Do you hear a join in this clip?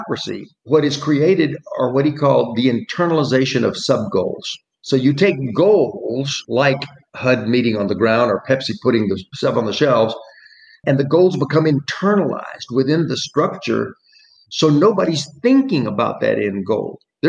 no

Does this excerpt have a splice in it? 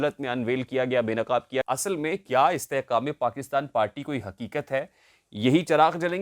yes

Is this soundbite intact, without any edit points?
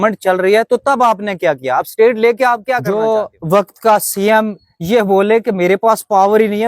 no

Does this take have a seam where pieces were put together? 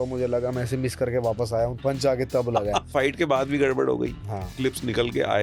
yes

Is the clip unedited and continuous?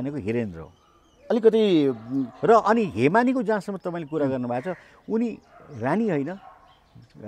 yes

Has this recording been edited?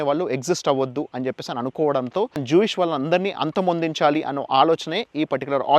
yes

